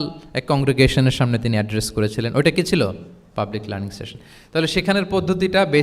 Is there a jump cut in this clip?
no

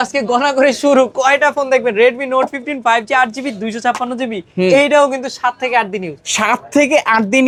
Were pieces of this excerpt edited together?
no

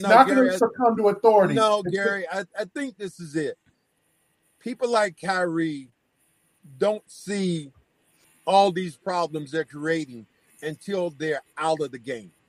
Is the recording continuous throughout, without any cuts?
yes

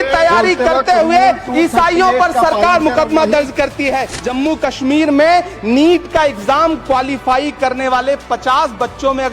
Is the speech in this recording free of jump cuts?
no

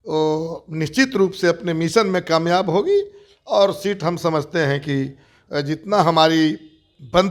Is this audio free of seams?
yes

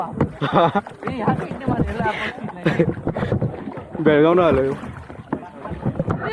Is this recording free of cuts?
yes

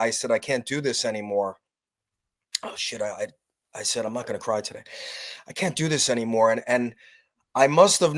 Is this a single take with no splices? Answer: yes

